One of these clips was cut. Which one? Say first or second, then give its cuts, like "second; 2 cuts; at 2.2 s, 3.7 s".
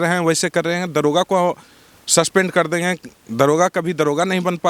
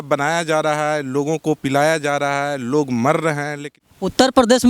second; 1 cut; at 3.6 s